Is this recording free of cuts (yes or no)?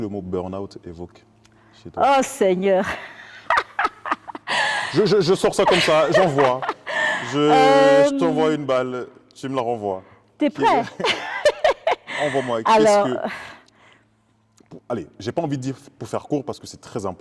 yes